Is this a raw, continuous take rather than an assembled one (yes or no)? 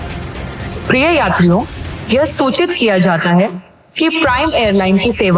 yes